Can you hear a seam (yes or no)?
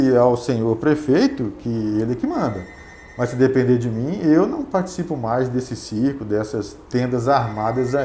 no